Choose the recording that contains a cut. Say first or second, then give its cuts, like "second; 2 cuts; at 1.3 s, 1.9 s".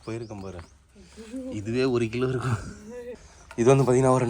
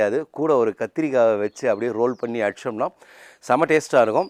first; 1 cut; at 3.2 s